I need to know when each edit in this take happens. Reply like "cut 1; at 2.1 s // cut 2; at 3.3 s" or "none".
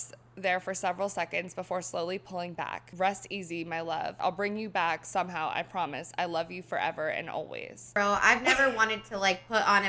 cut 1; at 2.8 s // cut 2; at 4.2 s // cut 3; at 8.0 s